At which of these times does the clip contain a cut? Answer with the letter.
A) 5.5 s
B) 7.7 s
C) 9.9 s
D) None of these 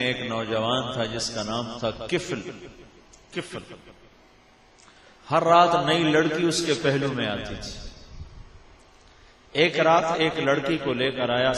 D